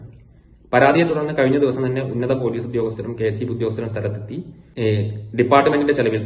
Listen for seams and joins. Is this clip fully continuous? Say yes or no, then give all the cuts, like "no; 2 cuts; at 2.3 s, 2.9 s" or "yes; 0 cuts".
no; 1 cut; at 4.6 s